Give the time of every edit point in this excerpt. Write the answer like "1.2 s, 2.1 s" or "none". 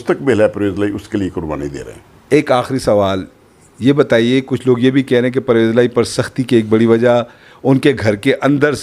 none